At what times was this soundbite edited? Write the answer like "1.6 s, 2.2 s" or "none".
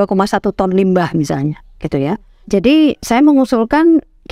none